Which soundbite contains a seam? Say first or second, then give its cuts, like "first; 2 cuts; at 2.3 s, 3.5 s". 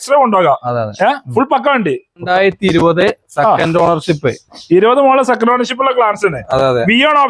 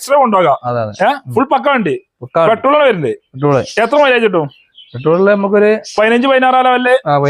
first; 1 cut; at 2.2 s